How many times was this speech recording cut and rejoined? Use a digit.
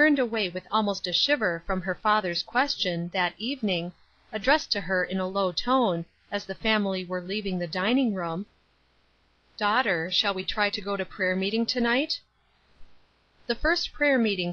0